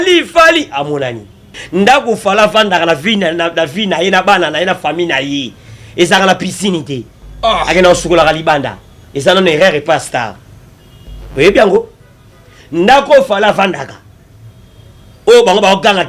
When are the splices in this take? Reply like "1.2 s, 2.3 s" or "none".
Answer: 1.6 s